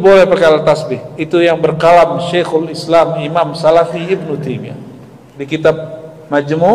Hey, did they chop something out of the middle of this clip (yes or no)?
no